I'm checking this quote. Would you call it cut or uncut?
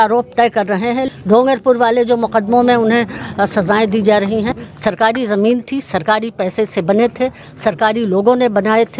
cut